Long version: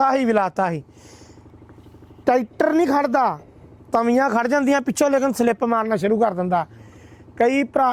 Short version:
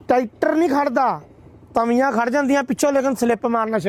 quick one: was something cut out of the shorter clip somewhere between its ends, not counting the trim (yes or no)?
no